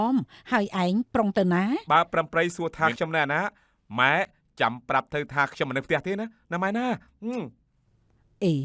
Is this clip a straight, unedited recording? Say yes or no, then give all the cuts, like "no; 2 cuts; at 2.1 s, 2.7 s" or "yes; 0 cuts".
no; 1 cut; at 1.8 s